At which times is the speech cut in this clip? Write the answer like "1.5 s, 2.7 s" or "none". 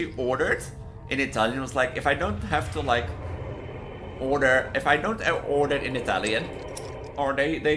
none